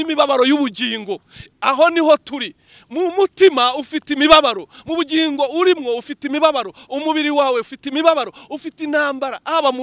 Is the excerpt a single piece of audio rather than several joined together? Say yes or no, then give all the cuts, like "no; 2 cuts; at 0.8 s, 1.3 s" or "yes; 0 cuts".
yes; 0 cuts